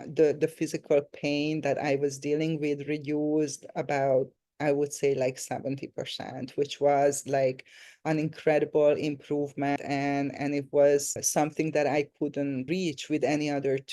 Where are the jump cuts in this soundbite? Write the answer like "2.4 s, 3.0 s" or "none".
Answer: 9.8 s, 11.2 s, 12.6 s